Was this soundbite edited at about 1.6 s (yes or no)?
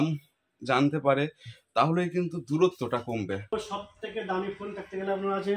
no